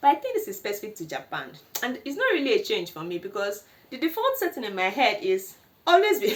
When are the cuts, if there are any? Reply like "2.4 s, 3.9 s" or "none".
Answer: none